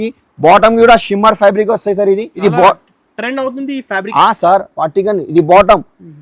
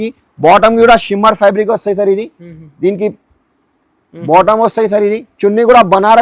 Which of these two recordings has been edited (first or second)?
first